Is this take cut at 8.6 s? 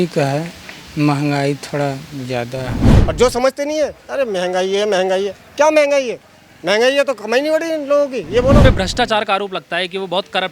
yes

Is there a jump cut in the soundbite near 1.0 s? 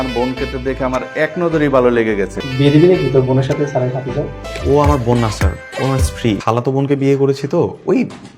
no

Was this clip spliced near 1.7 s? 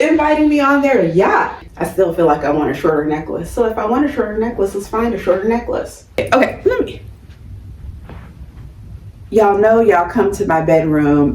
yes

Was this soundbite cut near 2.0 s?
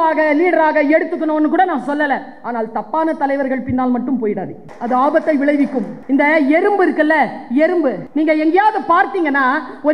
no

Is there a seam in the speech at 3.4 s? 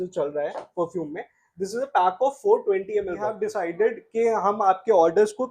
yes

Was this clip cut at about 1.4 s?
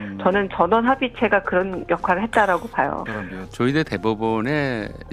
no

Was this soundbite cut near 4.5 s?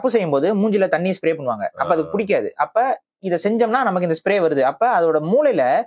no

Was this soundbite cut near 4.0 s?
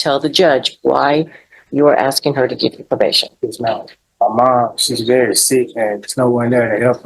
yes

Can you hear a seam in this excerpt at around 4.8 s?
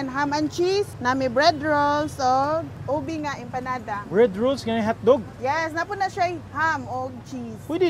no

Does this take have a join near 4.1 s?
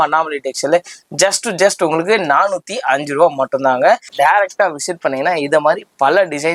yes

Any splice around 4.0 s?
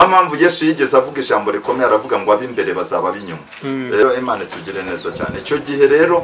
yes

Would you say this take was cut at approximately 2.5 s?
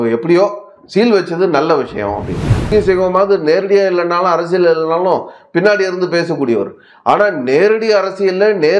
yes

